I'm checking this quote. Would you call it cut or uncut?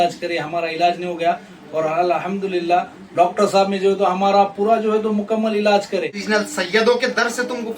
cut